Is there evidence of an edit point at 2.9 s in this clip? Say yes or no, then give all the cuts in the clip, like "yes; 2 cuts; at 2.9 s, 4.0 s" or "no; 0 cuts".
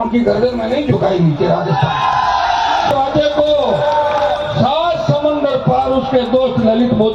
yes; 1 cut; at 2.9 s